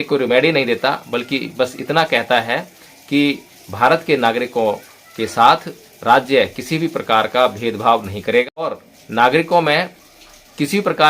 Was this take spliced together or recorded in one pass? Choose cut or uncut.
cut